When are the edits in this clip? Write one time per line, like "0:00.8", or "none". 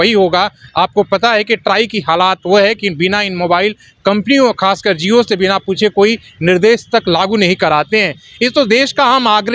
none

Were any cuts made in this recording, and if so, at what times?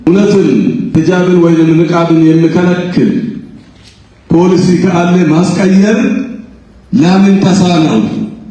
0:00.9

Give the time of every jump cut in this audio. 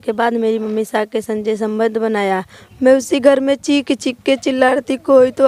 0:02.6

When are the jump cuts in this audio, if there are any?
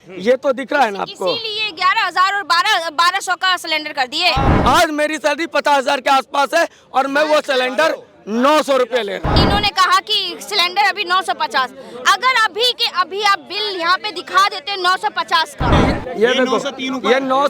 0:04.5
0:09.3
0:15.7

